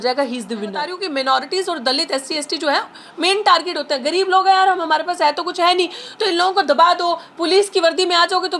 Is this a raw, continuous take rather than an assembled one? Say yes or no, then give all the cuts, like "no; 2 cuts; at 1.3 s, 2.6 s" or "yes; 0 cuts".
no; 1 cut; at 1.0 s